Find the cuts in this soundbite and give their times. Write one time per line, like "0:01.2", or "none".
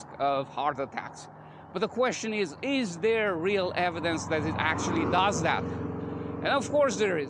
none